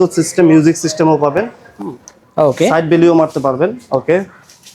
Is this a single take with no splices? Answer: no; 1 cut; at 1.6 s

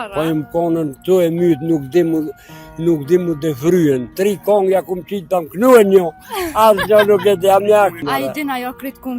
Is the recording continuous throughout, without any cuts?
no; 2 cuts; at 4.1 s, 8.0 s

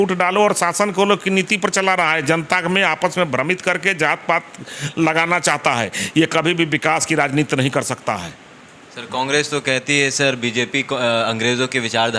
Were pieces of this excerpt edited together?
no; 0 cuts

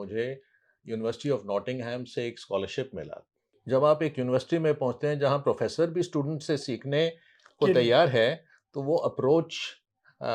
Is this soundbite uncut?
no; 1 cut; at 3.5 s

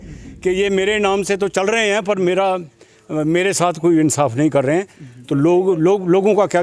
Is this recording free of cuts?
yes; 0 cuts

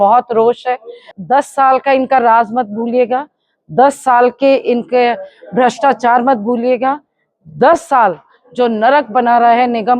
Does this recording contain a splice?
yes; 1 cut; at 1.1 s

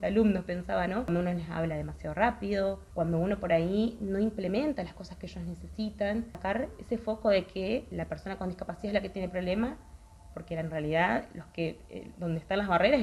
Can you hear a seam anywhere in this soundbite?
yes; 4 cuts; at 1.1 s, 2.8 s, 6.3 s, 7.9 s

